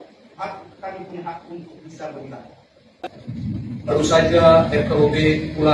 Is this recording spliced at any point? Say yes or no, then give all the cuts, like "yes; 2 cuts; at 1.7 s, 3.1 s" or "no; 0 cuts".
yes; 1 cut; at 3.1 s